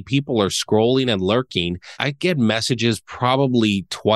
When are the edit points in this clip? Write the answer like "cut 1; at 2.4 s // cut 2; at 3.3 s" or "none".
cut 1; at 2.0 s